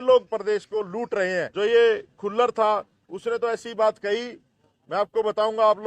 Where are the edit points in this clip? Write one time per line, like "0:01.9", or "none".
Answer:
0:01.5